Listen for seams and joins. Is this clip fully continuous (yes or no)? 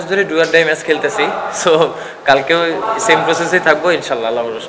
yes